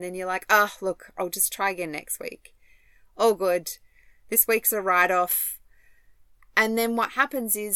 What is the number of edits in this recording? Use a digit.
0